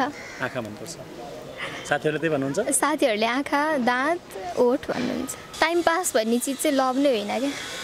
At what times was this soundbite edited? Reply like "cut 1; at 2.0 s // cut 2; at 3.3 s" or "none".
cut 1; at 5.4 s